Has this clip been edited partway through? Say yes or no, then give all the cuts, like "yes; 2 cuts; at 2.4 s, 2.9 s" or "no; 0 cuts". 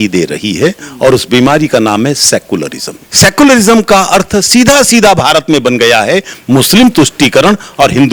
no; 0 cuts